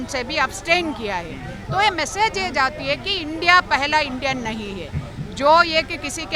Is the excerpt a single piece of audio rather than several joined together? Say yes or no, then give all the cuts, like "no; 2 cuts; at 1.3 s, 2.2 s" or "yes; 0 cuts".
yes; 0 cuts